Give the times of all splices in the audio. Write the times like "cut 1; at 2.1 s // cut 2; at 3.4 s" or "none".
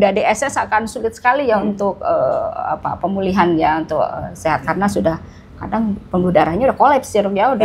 none